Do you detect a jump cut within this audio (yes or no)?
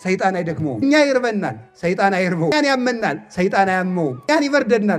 yes